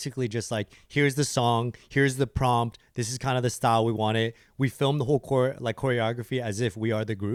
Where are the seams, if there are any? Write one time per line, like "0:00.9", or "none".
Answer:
none